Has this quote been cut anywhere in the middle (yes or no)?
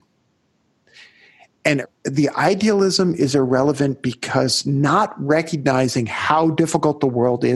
yes